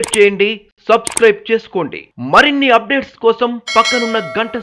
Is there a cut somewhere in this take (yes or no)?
no